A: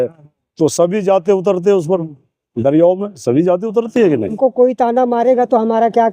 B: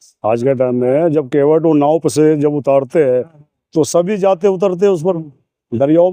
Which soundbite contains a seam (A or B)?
A